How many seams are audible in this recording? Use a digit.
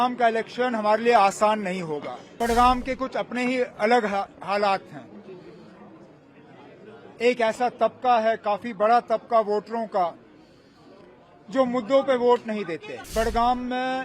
2